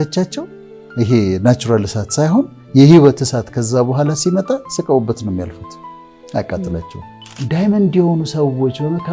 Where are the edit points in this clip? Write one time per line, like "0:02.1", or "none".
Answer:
0:07.3